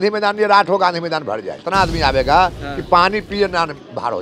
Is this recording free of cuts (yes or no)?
no